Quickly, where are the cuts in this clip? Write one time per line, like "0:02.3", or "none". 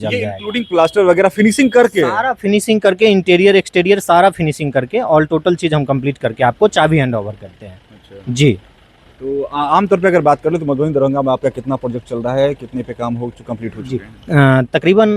none

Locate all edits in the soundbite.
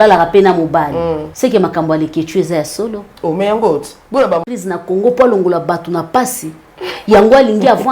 0:01.3
0:04.4

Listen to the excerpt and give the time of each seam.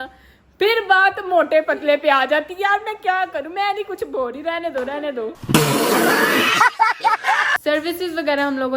none

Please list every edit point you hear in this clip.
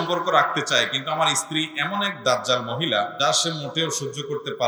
none

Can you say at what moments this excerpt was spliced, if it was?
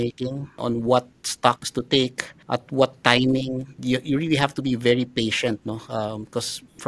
none

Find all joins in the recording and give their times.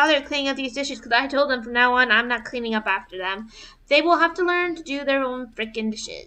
none

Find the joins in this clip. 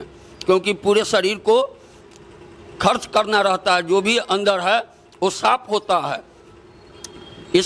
none

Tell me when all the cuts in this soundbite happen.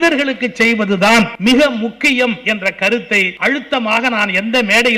0:01.3
0:02.9

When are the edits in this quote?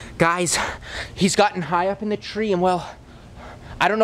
none

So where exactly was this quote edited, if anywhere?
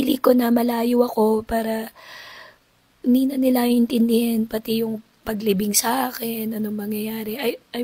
none

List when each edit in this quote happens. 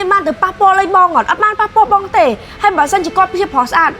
none

